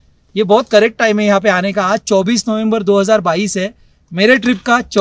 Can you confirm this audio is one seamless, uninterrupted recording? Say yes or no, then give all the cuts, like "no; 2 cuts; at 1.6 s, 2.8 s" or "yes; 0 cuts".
yes; 0 cuts